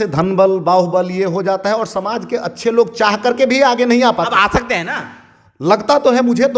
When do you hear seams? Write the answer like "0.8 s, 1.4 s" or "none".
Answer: none